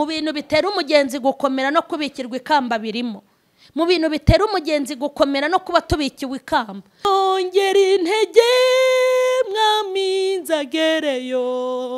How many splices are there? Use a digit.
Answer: 1